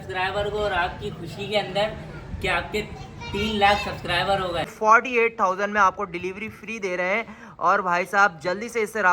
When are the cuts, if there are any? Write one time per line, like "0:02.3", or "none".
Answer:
0:04.7

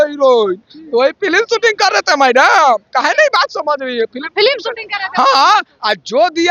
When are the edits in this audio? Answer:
none

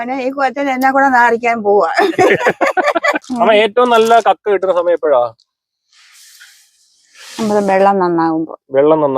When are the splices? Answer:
0:03.2

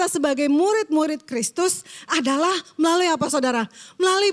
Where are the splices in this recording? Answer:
none

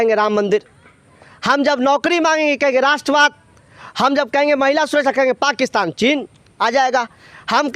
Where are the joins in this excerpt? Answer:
none

